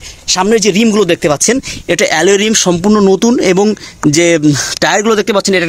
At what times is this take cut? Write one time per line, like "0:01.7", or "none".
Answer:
none

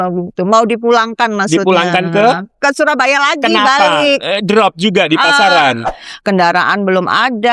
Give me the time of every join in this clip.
0:05.9

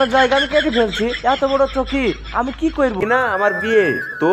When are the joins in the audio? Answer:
0:03.0

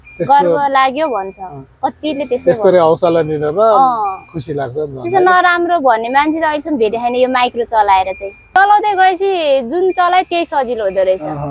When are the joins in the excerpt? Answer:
0:08.6

